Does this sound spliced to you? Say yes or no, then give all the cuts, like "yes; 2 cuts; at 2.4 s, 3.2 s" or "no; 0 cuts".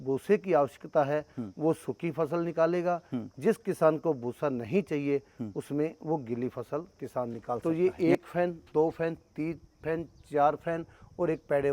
yes; 1 cut; at 7.6 s